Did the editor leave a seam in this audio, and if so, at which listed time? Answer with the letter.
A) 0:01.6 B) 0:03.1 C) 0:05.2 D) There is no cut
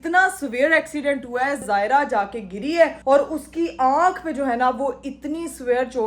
A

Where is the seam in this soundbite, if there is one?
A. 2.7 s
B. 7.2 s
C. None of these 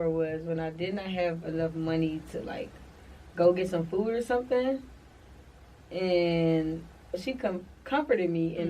B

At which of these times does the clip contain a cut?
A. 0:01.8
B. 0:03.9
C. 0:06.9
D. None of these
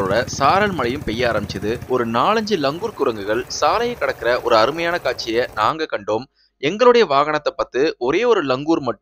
A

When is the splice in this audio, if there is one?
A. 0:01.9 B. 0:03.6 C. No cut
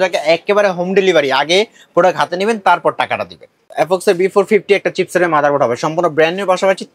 B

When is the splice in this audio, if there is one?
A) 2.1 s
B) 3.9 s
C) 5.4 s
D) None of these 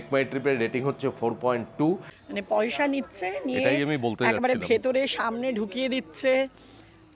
A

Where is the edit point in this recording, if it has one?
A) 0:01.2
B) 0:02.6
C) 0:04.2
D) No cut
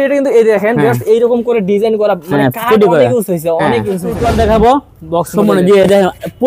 C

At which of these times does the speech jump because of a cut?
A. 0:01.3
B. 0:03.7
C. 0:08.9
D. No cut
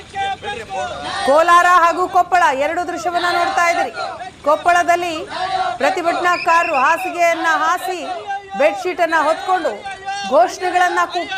A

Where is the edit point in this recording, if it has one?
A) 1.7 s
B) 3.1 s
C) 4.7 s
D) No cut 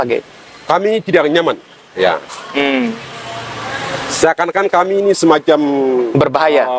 D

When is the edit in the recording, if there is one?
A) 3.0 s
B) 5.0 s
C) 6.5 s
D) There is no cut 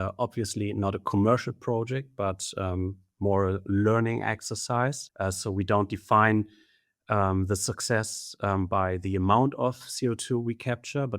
B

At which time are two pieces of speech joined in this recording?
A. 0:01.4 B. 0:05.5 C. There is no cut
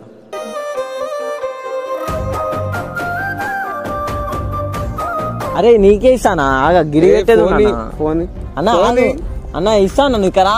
B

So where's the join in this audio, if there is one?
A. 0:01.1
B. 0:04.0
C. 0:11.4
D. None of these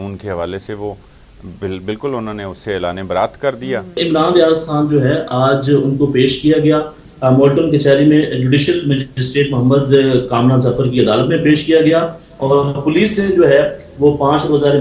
B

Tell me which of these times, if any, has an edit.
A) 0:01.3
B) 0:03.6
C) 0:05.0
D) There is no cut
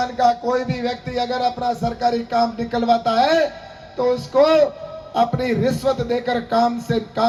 D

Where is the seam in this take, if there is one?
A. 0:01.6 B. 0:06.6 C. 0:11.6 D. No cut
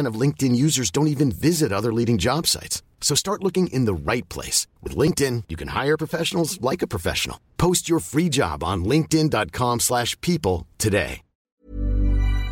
C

